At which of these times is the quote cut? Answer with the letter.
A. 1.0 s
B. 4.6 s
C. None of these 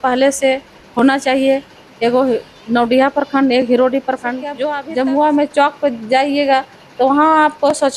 B